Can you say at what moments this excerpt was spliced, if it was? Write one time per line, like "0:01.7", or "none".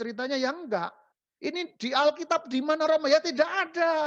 none